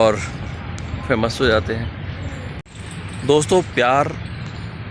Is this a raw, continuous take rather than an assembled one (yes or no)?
yes